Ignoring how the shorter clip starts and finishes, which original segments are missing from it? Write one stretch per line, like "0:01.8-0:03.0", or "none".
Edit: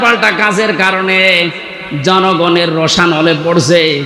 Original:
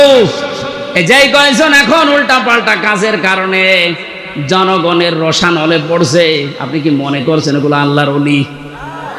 none